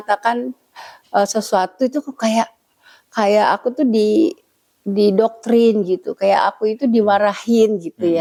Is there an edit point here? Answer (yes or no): no